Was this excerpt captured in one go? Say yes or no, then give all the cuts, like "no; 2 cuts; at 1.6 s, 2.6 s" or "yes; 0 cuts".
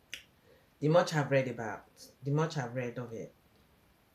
yes; 0 cuts